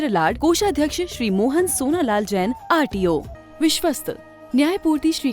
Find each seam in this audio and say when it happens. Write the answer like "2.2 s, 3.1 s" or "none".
3.4 s